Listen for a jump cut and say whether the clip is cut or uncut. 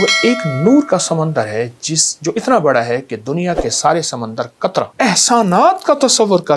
cut